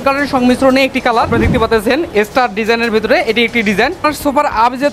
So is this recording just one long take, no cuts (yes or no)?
no